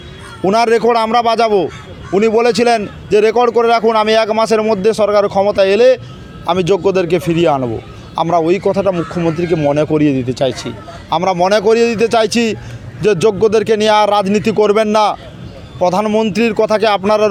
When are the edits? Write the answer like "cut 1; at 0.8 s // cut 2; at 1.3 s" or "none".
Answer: none